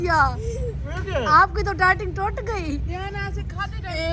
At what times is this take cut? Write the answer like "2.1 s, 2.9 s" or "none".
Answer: none